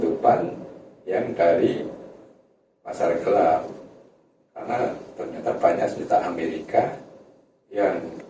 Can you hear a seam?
no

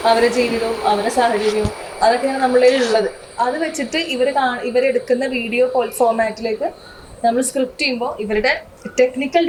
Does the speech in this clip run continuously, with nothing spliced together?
yes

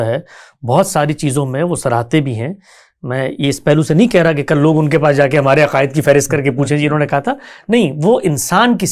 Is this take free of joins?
yes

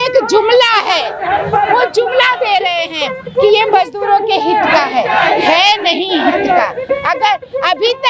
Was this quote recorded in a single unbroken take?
yes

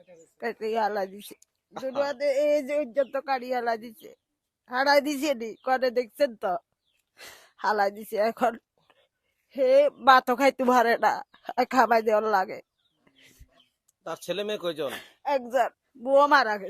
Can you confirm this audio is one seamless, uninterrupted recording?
yes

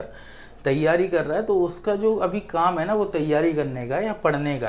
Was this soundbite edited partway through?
no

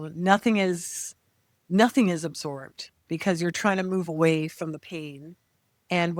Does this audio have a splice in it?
no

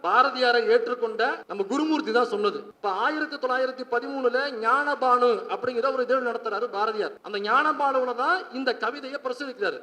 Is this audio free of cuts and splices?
no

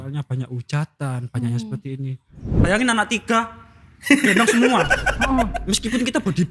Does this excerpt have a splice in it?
yes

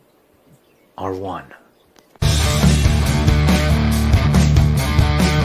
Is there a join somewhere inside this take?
yes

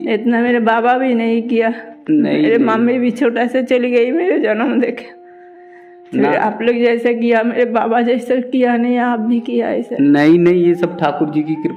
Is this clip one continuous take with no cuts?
yes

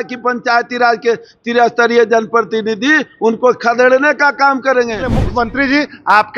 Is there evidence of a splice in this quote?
yes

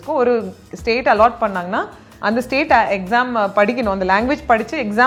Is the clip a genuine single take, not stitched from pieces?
yes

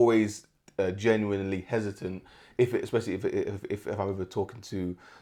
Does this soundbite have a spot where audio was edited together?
no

